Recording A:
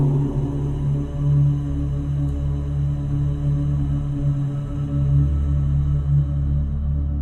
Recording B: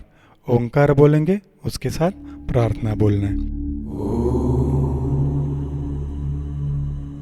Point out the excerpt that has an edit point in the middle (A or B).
B